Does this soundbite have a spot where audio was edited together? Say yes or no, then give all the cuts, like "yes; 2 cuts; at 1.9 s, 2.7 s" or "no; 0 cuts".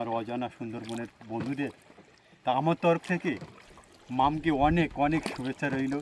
no; 0 cuts